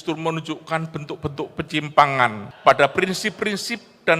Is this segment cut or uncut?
cut